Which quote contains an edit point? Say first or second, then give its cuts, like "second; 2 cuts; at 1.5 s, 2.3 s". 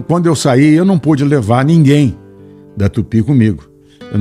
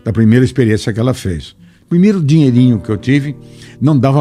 second; 1 cut; at 1.7 s